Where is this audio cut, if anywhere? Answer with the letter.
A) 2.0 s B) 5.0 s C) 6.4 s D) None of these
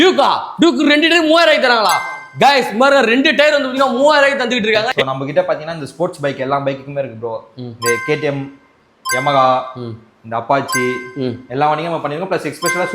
B